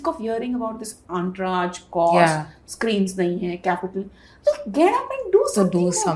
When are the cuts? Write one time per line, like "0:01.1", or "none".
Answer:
none